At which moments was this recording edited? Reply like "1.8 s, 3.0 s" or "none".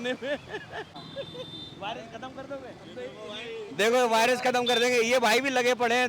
1.0 s